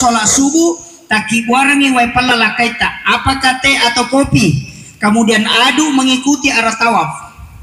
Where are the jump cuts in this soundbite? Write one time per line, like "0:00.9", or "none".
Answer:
none